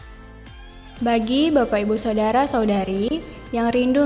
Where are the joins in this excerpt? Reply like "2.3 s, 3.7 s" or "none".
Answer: 1.0 s